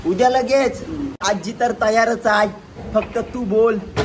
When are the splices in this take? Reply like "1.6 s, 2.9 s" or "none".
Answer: 1.2 s